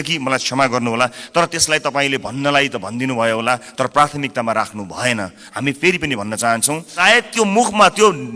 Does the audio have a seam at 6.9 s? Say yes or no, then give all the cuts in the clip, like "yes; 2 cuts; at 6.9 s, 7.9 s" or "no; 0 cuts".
yes; 1 cut; at 6.9 s